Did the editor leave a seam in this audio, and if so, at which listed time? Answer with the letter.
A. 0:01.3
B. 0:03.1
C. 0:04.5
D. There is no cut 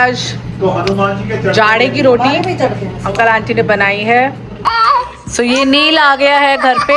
C